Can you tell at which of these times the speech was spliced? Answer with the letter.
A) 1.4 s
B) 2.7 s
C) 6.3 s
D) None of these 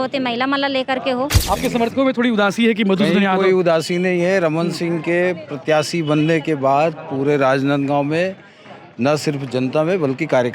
A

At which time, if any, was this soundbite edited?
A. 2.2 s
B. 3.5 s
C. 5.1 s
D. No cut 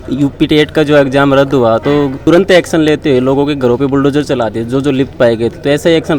A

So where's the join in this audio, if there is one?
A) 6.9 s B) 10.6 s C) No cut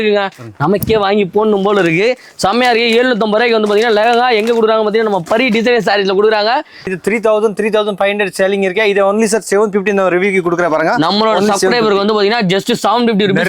A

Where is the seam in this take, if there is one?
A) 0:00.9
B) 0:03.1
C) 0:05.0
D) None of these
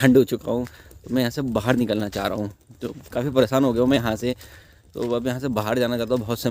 D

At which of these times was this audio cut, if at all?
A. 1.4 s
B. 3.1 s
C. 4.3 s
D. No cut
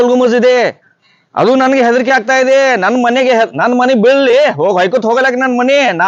D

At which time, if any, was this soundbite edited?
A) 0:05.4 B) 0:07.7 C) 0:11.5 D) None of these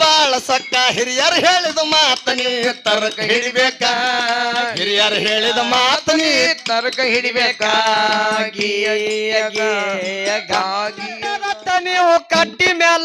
C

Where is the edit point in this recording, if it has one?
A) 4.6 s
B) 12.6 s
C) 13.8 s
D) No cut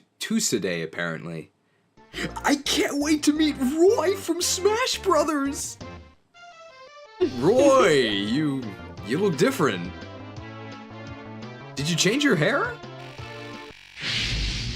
C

